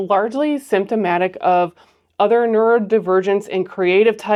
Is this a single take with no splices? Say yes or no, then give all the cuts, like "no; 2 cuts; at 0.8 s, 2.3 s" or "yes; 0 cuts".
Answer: yes; 0 cuts